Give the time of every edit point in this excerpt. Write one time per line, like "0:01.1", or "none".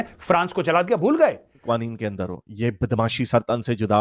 0:01.6